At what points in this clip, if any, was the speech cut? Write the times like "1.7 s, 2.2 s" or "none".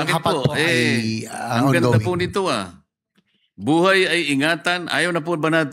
none

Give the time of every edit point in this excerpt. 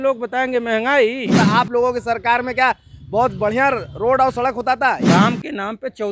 1.4 s, 5.0 s

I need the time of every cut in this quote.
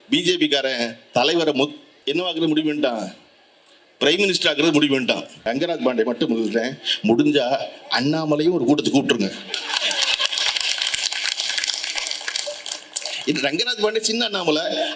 1.9 s, 5.4 s

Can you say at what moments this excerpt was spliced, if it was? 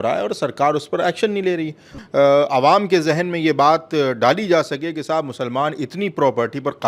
1.9 s

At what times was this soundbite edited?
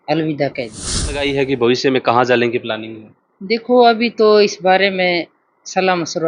1.2 s

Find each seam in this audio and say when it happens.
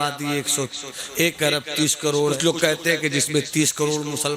2.4 s

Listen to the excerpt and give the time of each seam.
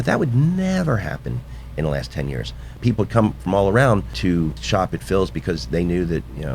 2.7 s, 4.4 s

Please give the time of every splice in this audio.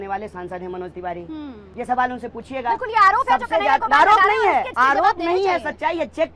1.6 s, 4.7 s

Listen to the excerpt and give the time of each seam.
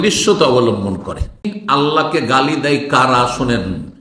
1.6 s

